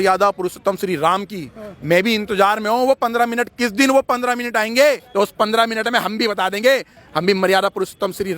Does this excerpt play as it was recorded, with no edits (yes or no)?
no